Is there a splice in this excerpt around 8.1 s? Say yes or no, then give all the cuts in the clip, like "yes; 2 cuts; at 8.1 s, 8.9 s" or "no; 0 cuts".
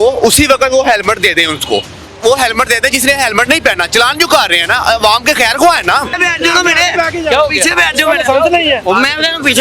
no; 2 cuts; at 2.0 s, 6.2 s